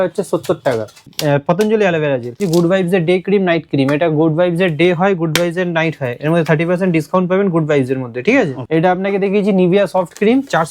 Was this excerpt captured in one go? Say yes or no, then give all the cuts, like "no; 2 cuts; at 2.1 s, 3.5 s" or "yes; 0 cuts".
no; 3 cuts; at 1.1 s, 2.4 s, 8.6 s